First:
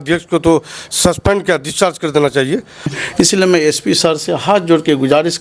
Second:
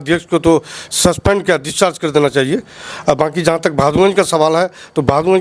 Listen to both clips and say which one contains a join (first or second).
first